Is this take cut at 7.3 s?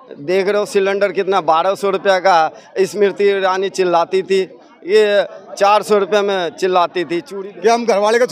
yes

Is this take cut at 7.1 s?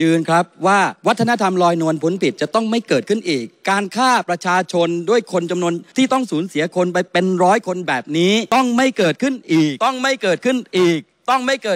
yes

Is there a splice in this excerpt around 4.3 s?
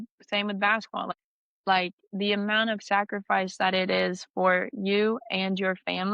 no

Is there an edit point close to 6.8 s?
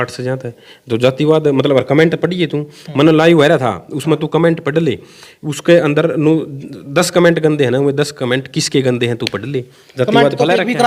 no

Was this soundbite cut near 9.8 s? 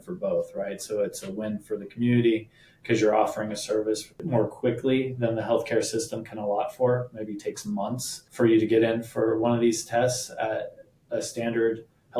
no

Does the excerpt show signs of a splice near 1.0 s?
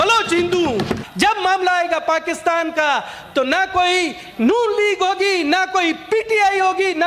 yes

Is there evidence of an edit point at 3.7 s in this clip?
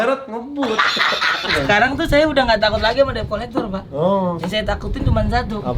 no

